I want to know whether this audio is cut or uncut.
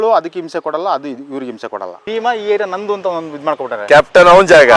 cut